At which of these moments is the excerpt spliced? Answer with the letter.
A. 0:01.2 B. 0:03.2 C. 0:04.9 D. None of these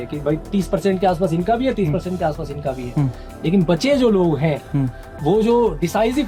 D